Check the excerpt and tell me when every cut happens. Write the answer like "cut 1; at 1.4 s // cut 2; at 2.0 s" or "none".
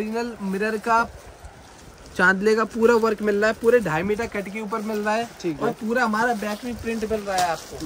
none

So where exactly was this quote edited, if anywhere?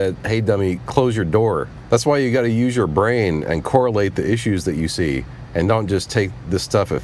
none

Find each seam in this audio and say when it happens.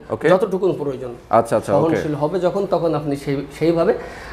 none

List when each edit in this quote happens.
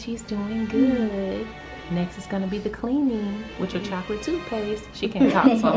none

